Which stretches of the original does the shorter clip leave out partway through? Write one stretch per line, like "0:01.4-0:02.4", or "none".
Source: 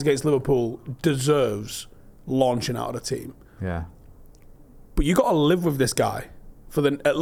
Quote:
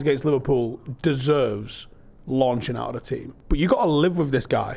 0:03.3-0:04.8

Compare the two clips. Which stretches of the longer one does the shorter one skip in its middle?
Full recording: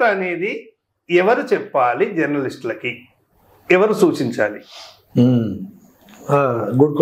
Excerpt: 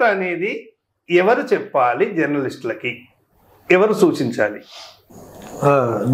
0:05.0-0:05.6

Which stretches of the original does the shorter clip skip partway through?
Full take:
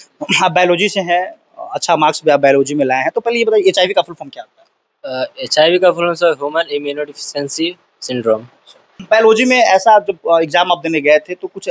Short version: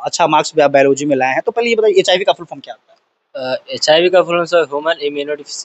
none

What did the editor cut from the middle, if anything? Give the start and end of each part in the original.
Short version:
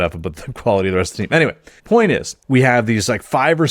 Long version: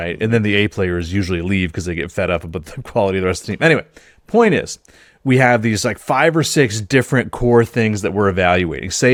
0:04.0-0:04.1
0:04.8-0:05.1

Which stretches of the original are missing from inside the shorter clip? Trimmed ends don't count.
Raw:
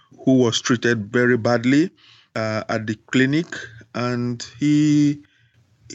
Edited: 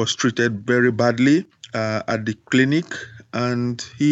0:02.1-0:02.2

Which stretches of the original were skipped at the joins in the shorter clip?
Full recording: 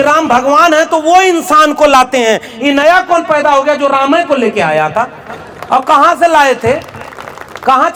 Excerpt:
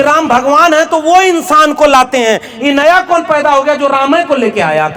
none

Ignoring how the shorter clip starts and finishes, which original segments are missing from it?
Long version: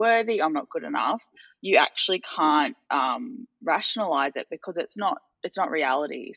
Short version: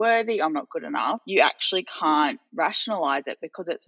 0:01.2-0:01.6
0:02.8-0:03.5

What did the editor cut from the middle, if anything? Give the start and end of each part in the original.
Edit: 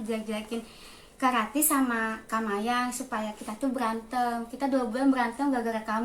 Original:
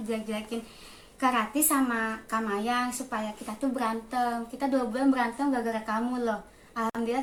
none

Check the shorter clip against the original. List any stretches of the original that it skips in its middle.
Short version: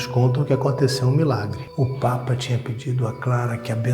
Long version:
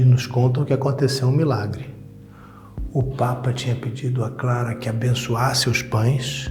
0:01.8-0:02.8

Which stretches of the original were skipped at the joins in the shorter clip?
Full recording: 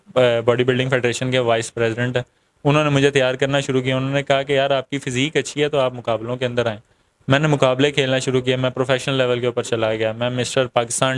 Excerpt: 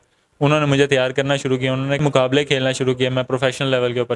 0:04.2-0:07.5

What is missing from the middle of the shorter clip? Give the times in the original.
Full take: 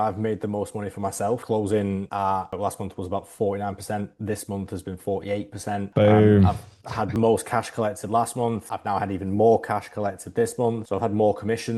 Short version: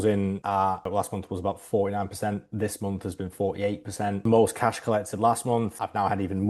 0:05.9-0:07.1

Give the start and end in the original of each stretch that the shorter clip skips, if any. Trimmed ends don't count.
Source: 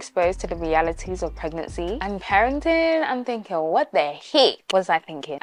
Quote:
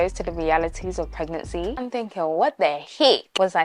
0:02.0-0:03.1

